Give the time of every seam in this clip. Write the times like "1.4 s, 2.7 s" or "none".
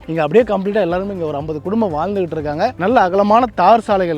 2.8 s